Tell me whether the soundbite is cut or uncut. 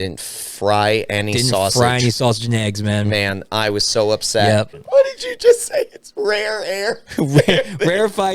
cut